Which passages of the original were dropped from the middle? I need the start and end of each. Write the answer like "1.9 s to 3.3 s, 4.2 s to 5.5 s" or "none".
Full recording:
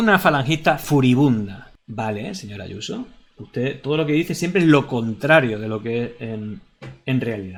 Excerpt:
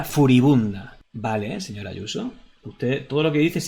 none